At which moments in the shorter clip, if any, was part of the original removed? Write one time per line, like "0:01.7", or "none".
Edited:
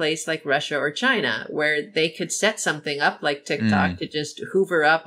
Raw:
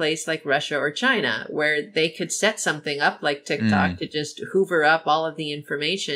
none